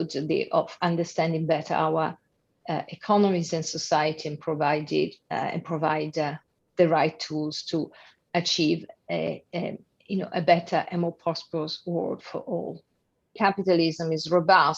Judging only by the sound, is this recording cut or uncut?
cut